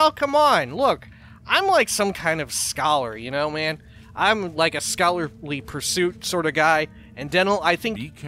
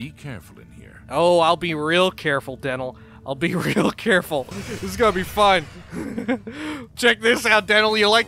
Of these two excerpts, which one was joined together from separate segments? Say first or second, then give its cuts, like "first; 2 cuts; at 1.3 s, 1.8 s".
second; 2 cuts; at 4.6 s, 7.0 s